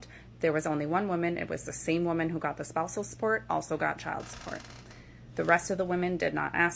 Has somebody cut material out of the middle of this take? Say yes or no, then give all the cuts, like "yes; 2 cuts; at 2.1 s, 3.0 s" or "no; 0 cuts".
yes; 1 cut; at 4.9 s